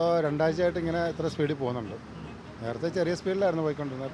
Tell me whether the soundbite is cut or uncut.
uncut